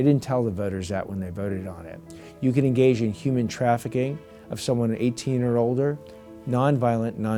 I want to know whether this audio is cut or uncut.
uncut